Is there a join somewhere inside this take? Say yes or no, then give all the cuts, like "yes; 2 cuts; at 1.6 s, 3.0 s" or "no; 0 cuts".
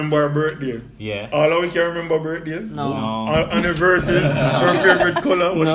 no; 0 cuts